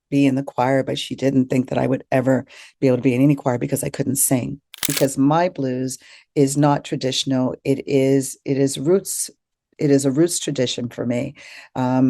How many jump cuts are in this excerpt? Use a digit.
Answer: 1